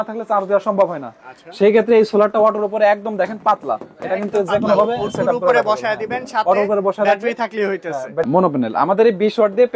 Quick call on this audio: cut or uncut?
cut